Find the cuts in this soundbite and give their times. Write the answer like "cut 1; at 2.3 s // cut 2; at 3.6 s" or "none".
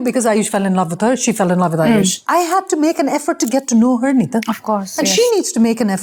none